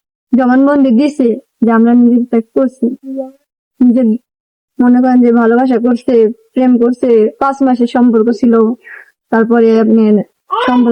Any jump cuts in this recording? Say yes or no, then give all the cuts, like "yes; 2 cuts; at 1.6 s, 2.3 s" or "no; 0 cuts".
no; 0 cuts